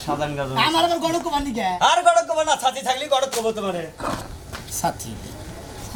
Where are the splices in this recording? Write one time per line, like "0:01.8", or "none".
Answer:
none